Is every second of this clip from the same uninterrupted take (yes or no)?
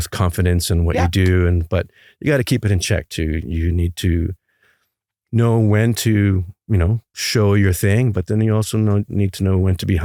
yes